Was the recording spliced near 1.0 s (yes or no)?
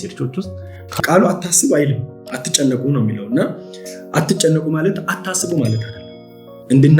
yes